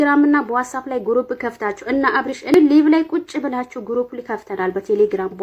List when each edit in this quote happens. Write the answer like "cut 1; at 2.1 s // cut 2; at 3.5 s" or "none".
cut 1; at 2.5 s